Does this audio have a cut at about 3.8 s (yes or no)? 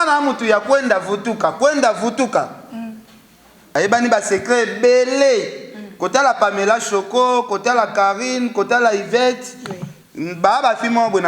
yes